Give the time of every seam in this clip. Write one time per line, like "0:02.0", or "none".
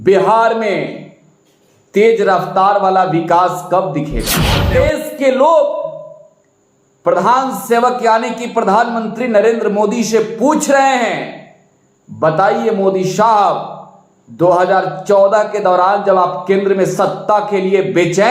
0:04.7